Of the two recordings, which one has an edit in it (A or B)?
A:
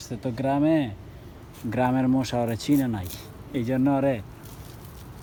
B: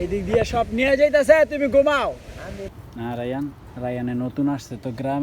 B